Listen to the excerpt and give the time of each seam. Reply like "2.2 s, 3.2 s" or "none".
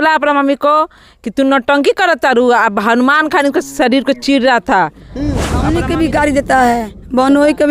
5.5 s